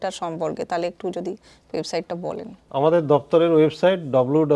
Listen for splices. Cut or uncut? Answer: uncut